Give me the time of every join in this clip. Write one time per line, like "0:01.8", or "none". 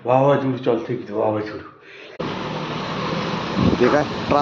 0:02.2